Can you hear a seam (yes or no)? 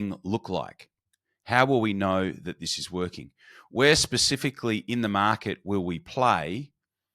yes